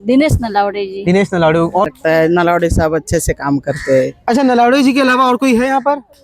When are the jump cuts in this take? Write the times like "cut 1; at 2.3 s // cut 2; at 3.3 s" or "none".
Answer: cut 1; at 1.9 s